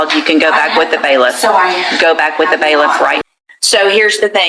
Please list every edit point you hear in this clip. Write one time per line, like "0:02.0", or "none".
0:03.2